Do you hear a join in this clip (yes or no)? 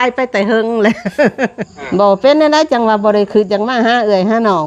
yes